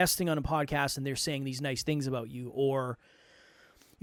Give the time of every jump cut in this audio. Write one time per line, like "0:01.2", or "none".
none